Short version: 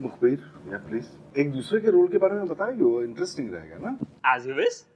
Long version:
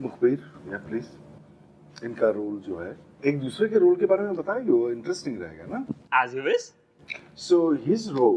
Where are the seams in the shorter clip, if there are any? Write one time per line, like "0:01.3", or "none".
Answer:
0:01.2

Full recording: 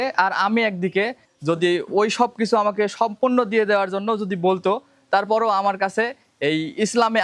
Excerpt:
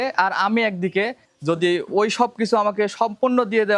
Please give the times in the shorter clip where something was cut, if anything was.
none

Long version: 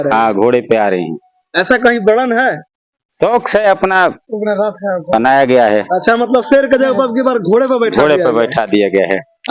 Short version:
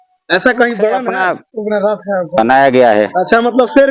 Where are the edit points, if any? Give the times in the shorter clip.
0:01.1

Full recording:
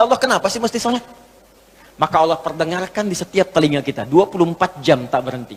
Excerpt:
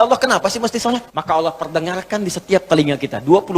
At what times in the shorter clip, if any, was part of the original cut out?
0:01.1

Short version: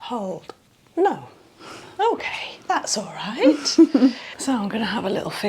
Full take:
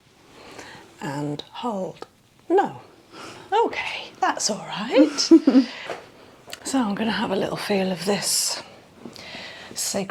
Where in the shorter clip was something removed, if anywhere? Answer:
0:04.3

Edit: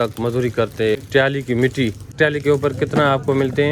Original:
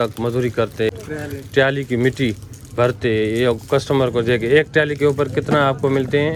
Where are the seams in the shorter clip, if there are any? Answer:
0:01.0
0:02.1

